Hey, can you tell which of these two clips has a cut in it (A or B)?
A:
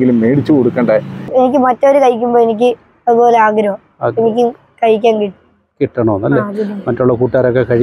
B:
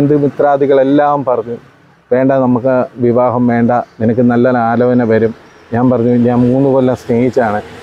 A